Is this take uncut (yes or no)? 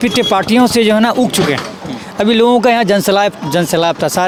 yes